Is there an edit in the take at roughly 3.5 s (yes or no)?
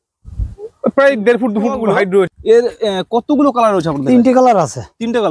no